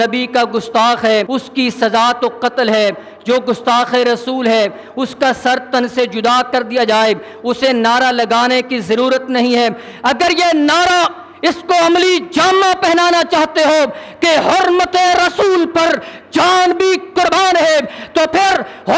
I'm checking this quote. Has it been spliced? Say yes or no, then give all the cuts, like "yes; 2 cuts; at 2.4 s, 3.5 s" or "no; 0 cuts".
yes; 1 cut; at 1.3 s